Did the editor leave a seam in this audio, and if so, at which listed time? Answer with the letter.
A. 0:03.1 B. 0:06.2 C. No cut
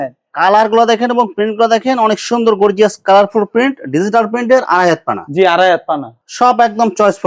B